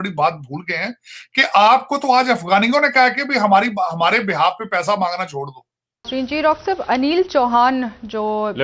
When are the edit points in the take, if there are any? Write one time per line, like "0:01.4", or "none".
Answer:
0:06.1